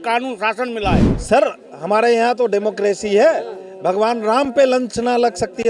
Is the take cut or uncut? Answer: cut